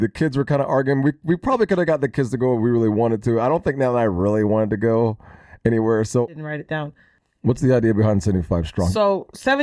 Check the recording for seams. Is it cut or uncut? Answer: cut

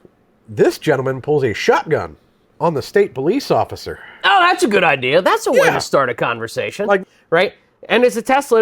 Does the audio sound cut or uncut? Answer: cut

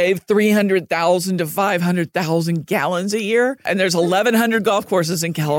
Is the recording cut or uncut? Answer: cut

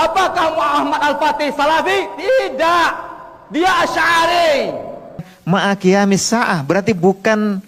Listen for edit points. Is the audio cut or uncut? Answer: cut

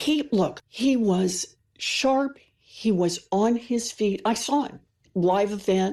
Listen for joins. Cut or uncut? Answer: uncut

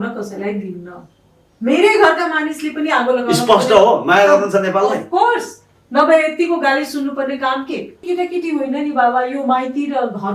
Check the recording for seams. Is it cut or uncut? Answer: cut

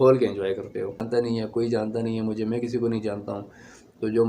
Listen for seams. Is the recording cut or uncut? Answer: cut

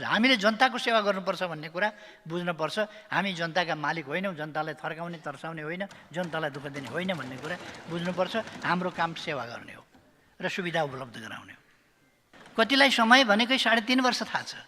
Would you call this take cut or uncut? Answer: cut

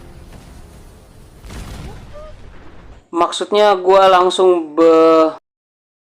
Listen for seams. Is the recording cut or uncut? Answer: uncut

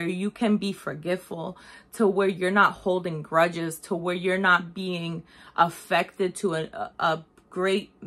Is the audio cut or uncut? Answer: uncut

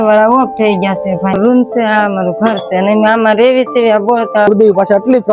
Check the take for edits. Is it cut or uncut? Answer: cut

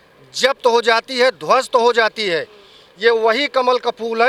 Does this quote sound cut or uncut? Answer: uncut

